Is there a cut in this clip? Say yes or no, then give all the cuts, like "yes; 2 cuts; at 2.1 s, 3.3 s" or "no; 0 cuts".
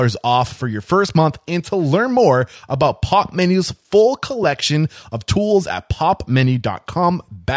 no; 0 cuts